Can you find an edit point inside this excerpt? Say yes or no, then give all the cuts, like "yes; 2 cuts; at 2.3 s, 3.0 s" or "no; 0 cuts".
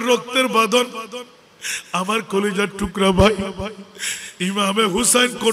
no; 0 cuts